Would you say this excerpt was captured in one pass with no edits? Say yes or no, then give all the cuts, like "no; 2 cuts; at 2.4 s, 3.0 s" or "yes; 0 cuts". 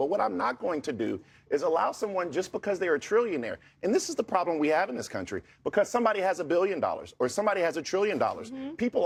yes; 0 cuts